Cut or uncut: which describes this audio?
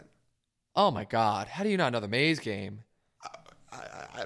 uncut